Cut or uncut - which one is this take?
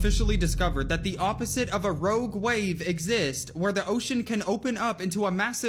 uncut